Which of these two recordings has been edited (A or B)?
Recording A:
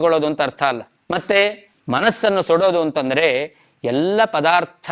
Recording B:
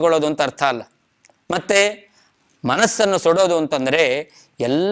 A